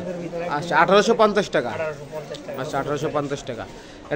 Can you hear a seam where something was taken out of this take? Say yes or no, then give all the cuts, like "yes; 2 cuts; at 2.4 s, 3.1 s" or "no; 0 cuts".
no; 0 cuts